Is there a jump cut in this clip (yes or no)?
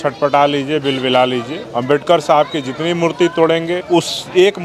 yes